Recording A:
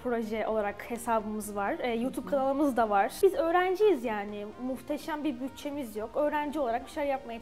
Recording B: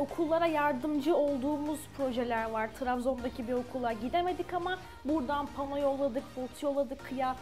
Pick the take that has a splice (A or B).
A